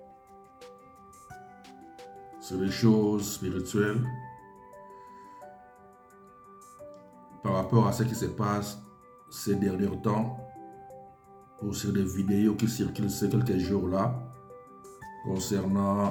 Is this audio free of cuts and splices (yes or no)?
yes